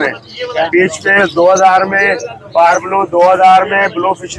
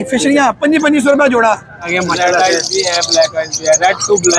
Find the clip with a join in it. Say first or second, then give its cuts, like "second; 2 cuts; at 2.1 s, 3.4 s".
second; 1 cut; at 1.9 s